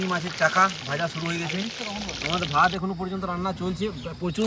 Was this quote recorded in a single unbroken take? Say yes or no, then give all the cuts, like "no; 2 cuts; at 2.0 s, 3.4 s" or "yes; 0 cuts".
no; 1 cut; at 2.1 s